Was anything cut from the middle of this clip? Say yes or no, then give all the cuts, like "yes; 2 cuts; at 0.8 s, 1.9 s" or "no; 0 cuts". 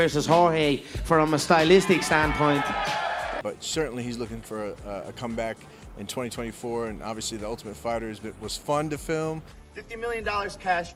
no; 0 cuts